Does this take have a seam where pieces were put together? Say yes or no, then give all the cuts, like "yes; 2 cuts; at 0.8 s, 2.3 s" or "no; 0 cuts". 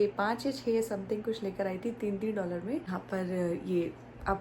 yes; 1 cut; at 2.9 s